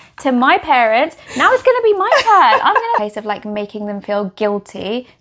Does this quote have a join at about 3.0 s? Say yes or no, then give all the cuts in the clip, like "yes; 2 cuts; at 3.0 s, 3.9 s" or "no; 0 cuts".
yes; 1 cut; at 3.0 s